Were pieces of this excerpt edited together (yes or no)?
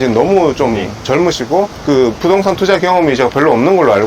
yes